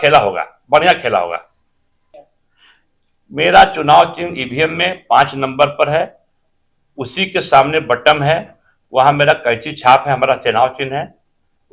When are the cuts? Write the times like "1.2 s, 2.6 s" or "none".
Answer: none